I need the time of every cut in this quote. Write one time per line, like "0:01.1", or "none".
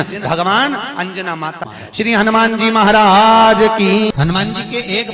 0:01.7
0:04.1